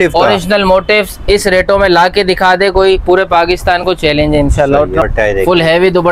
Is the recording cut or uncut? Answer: cut